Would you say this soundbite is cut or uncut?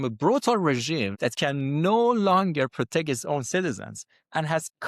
cut